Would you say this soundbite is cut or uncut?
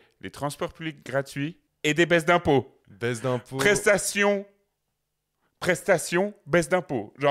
cut